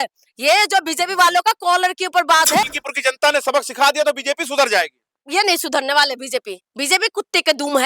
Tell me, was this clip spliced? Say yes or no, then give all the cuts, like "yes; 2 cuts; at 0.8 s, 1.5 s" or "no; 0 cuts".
yes; 2 cuts; at 2.6 s, 5.2 s